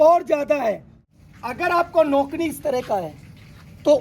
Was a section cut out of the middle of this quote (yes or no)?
yes